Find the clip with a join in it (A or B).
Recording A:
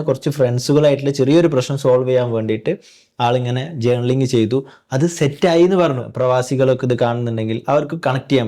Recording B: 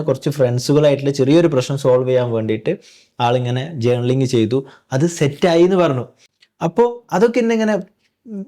A